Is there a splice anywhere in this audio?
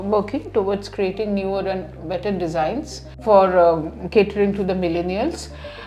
yes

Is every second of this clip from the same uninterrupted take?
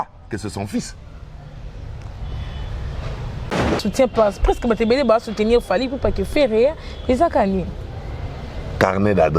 no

